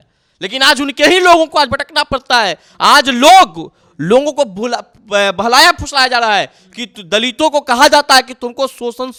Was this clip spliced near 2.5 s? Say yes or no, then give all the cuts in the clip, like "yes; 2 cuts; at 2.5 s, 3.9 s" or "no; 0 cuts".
no; 0 cuts